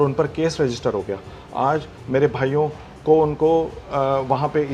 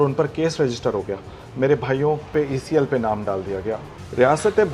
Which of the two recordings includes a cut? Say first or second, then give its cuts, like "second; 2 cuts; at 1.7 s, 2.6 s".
second; 3 cuts; at 1.4 s, 2.3 s, 3.9 s